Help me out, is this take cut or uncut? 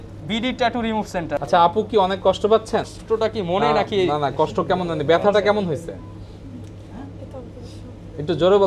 uncut